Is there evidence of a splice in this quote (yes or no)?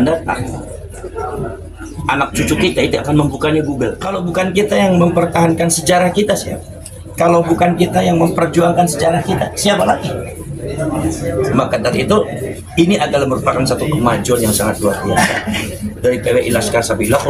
yes